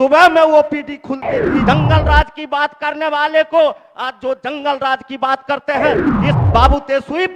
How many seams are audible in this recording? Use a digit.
2